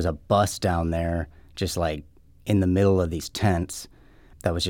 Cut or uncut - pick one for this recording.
uncut